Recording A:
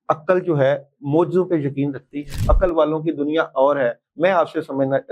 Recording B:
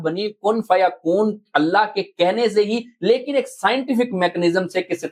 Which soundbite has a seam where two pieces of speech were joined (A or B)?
A